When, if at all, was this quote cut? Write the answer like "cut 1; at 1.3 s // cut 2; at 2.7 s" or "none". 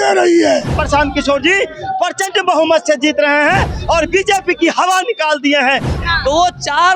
cut 1; at 0.8 s // cut 2; at 6.0 s